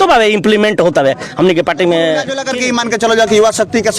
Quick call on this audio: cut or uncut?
cut